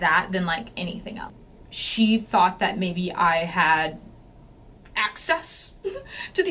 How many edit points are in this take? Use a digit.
1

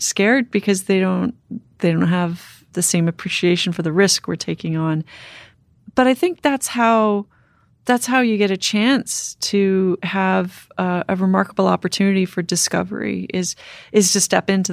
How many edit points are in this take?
0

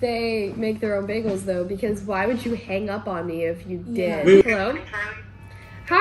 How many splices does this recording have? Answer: 1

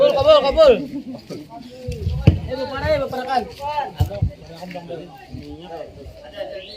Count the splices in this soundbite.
1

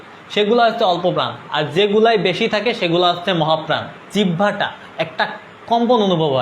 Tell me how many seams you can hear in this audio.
1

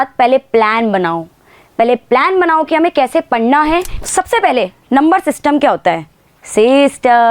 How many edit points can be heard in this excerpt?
1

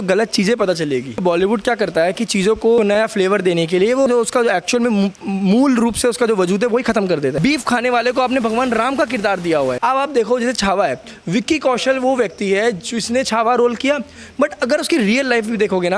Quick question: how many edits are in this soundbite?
5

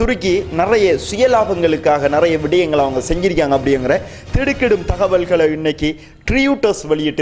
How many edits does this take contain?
0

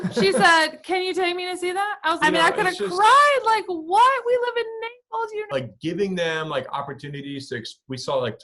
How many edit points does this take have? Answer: 1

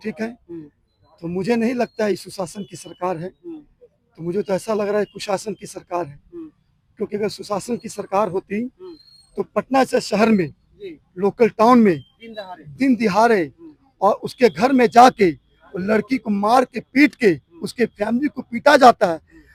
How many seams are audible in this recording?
0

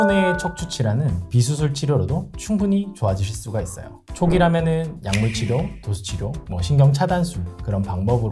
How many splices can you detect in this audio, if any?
1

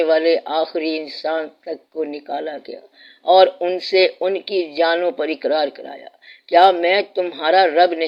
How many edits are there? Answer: 0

